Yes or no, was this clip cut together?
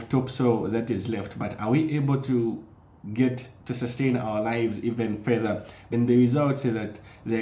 yes